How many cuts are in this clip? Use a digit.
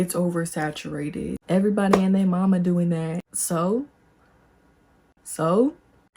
1